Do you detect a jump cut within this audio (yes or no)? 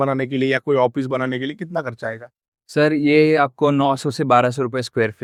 no